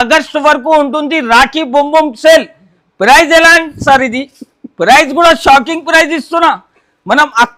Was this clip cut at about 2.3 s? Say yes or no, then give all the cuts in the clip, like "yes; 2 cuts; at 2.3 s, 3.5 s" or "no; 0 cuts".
no; 0 cuts